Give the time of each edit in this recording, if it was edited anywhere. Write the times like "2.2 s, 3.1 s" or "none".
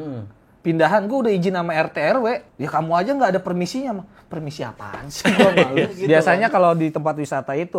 2.5 s, 6.0 s